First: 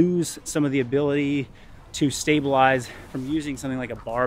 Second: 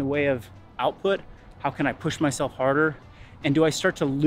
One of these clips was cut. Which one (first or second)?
first